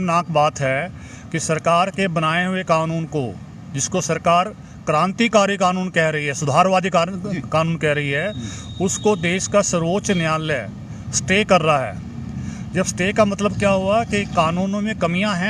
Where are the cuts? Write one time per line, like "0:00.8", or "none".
none